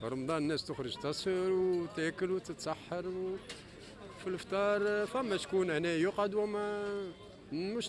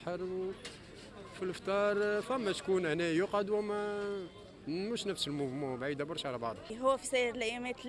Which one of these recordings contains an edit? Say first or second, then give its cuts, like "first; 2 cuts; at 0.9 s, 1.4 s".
second; 1 cut; at 6.7 s